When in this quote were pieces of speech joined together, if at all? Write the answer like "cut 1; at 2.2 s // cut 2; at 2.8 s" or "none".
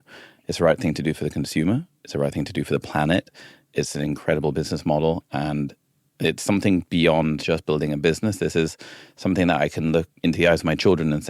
cut 1; at 3.6 s // cut 2; at 10.1 s